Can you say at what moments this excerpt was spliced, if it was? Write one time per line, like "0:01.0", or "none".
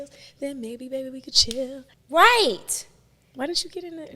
0:01.9